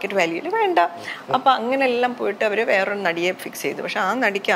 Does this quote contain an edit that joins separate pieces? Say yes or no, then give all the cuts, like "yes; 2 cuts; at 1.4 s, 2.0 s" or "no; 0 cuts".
no; 0 cuts